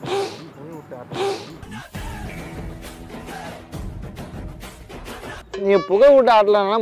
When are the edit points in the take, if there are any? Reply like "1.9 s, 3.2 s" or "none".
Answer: 5.6 s